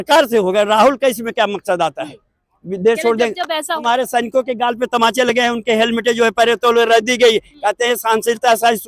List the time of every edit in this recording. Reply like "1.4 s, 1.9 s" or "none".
3.7 s